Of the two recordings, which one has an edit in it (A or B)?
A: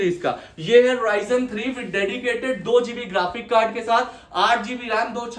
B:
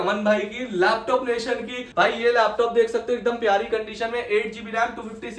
B